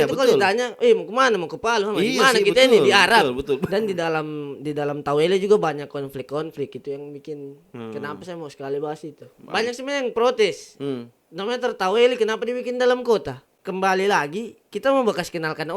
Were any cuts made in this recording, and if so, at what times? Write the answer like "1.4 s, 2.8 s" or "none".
3.6 s, 9.3 s, 13.5 s